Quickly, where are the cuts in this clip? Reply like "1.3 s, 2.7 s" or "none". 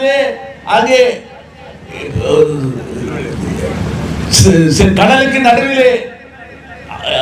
none